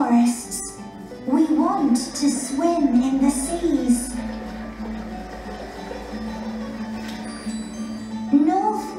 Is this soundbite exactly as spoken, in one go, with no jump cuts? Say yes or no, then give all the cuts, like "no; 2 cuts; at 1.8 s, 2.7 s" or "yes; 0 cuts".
yes; 0 cuts